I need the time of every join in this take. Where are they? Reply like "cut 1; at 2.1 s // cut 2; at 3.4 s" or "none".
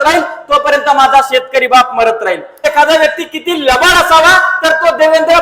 cut 1; at 2.6 s